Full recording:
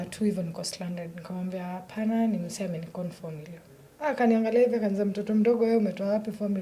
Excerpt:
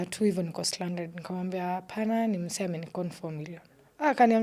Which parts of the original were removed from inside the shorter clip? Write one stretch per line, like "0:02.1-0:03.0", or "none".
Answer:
none